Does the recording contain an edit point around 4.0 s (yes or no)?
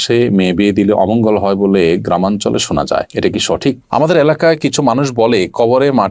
yes